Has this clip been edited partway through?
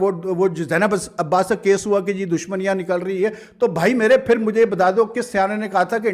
no; 0 cuts

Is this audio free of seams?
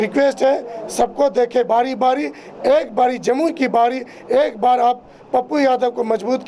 yes; 0 cuts

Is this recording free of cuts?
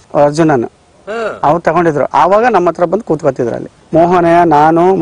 no; 1 cut; at 3.7 s

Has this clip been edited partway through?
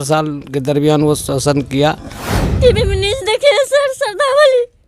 yes; 1 cut; at 2.4 s

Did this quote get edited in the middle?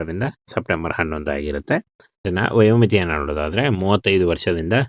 yes; 1 cut; at 2.3 s

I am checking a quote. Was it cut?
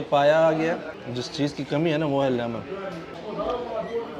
yes; 2 cuts; at 0.9 s, 3.1 s

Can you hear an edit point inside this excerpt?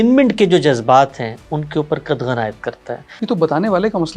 yes; 1 cut; at 3.1 s

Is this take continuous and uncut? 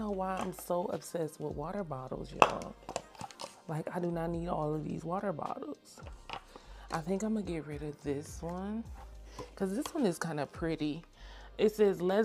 yes; 0 cuts

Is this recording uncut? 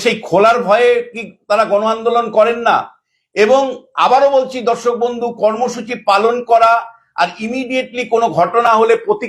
yes; 0 cuts

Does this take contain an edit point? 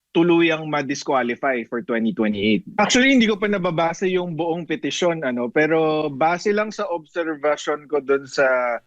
yes; 1 cut; at 2.7 s

